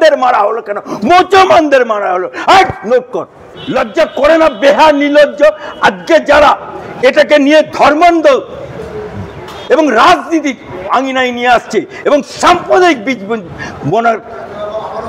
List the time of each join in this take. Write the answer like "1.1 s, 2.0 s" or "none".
3.5 s